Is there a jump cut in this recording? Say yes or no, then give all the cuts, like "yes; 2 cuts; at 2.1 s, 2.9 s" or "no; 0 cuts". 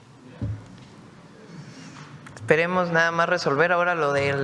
no; 0 cuts